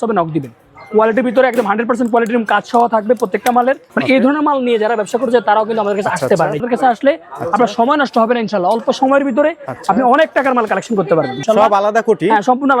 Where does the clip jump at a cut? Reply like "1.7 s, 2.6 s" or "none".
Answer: 3.8 s, 6.6 s, 11.4 s